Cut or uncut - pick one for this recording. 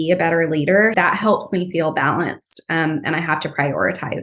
cut